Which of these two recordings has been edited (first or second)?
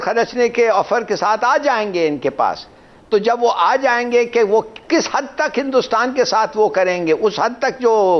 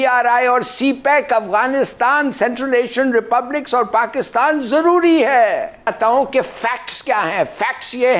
second